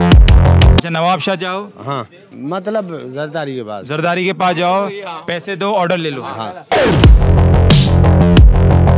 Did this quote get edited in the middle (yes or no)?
yes